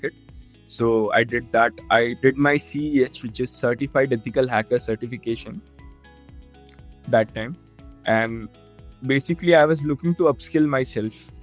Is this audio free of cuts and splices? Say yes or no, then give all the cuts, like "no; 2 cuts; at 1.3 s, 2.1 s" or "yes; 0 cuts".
yes; 0 cuts